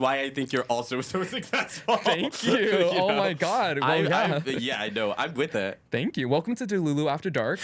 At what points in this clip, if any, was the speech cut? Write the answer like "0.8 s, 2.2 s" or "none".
none